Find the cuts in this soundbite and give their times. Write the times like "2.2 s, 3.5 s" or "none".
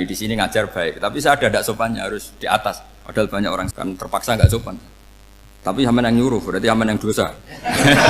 3.7 s